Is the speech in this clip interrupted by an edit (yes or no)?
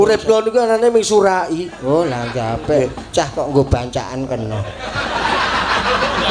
no